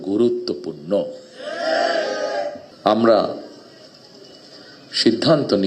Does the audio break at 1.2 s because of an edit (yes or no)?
no